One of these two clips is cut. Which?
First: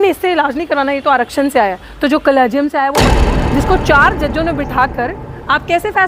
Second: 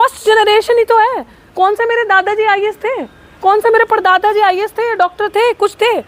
first; 1 cut; at 3.3 s

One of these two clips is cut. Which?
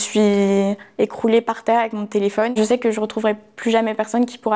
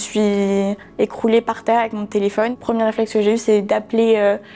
first; 1 cut; at 2.5 s

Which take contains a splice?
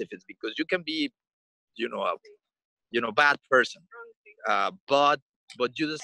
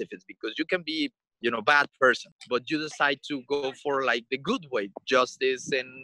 second; 2 cuts; at 1.2 s, 2.3 s

